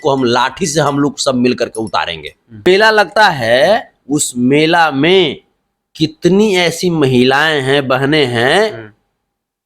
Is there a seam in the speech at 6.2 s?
no; 1 cut; at 2.7 s

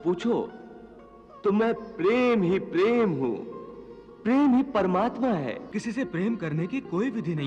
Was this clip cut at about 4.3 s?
no; 1 cut; at 5.7 s

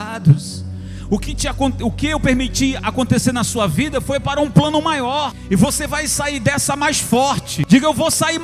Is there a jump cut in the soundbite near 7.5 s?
yes; 2 cuts; at 5.4 s, 7.5 s

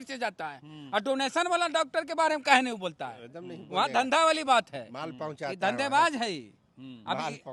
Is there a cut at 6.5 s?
no; 0 cuts

